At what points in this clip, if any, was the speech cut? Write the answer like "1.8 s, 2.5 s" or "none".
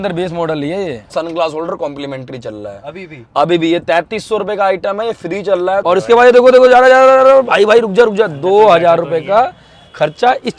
1.1 s, 5.8 s